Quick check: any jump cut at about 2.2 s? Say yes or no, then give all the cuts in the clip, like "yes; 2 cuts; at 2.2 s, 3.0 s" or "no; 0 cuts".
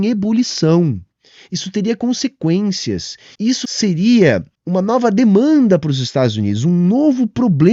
no; 2 cuts; at 3.6 s, 4.5 s